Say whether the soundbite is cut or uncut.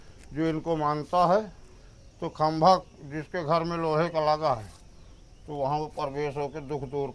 uncut